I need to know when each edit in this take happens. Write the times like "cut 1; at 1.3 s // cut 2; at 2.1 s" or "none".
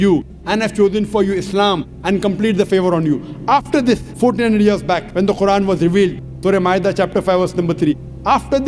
cut 1; at 4.1 s // cut 2; at 5.1 s